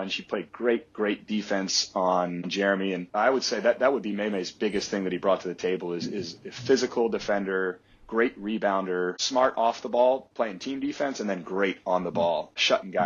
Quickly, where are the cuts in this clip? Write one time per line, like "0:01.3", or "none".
0:03.0